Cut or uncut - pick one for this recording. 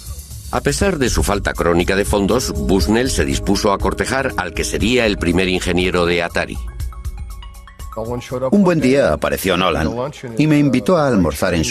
uncut